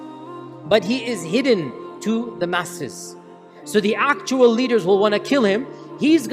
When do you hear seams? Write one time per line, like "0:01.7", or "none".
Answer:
0:03.5